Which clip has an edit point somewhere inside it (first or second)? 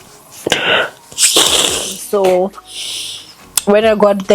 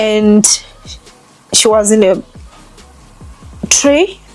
first